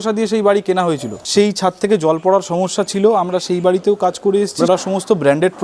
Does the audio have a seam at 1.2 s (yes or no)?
yes